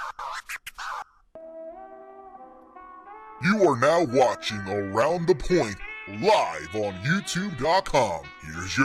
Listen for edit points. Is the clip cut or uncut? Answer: uncut